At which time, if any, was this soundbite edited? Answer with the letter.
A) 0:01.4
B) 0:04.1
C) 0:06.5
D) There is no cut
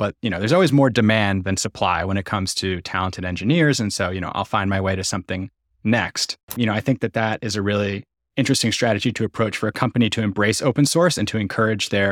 C